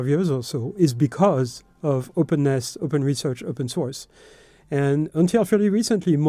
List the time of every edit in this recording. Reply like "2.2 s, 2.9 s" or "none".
none